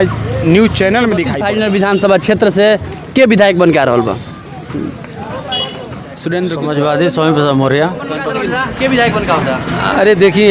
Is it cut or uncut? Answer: cut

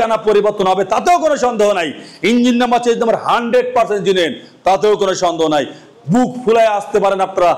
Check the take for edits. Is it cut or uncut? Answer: uncut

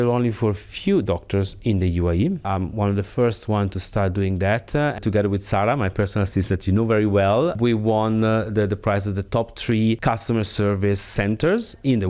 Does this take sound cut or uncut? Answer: cut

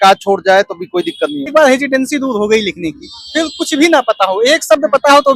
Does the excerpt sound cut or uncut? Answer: cut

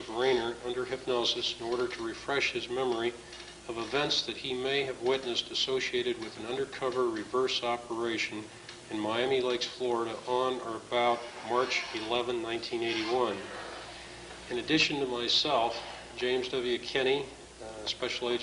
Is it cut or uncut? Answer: uncut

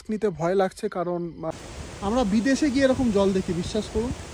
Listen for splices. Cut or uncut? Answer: cut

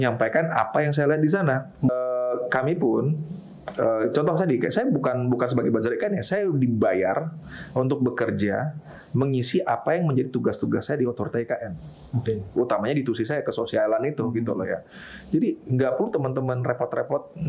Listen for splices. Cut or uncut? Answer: cut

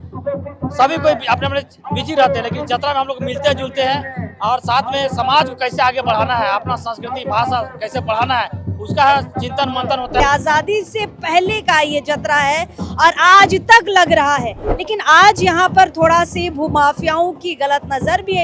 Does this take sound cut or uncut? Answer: cut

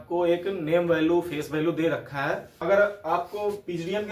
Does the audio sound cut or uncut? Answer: cut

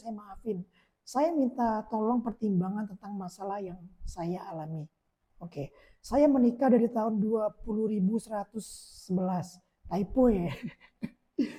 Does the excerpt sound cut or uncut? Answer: uncut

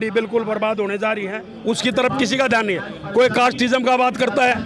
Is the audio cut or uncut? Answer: cut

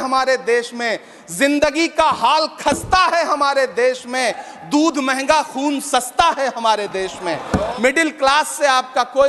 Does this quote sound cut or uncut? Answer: cut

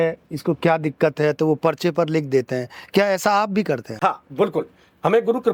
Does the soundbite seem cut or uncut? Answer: uncut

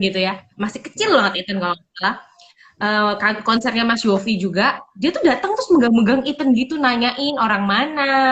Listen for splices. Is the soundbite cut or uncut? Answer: uncut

